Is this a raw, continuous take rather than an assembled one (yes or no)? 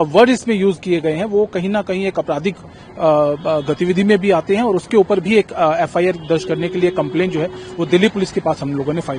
yes